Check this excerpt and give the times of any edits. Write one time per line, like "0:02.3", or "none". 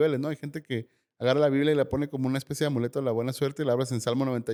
none